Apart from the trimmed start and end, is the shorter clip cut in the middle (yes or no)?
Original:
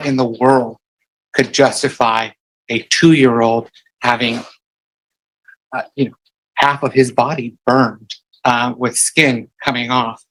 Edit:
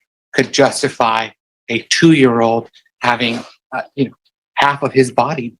yes